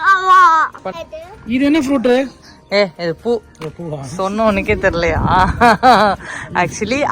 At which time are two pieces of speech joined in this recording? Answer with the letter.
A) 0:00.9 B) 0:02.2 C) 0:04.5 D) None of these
A